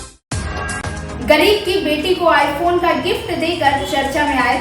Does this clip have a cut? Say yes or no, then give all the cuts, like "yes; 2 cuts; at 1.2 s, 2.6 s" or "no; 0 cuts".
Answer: no; 0 cuts